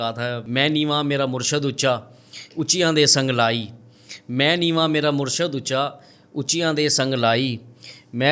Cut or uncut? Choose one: uncut